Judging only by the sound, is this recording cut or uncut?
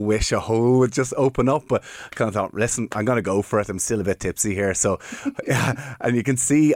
uncut